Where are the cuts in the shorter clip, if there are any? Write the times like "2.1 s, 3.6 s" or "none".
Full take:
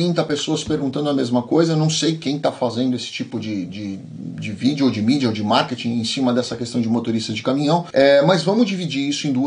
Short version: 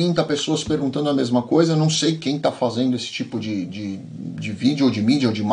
none